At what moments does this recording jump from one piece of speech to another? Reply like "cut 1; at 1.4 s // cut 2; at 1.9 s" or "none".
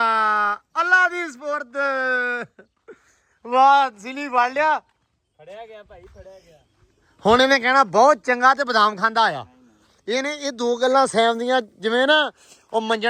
none